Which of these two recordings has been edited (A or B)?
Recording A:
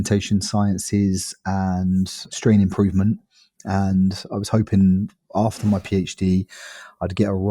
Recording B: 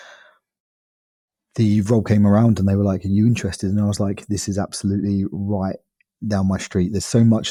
A